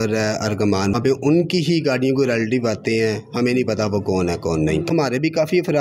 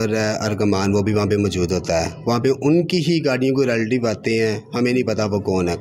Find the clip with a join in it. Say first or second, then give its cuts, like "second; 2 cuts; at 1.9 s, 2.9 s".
first; 2 cuts; at 0.9 s, 4.9 s